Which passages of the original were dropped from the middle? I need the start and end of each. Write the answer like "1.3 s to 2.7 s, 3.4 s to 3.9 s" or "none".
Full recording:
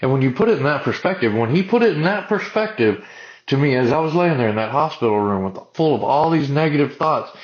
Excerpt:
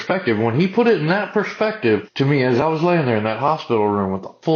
3.0 s to 3.4 s